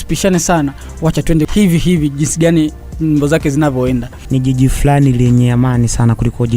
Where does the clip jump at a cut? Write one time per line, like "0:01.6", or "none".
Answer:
0:01.4
0:04.2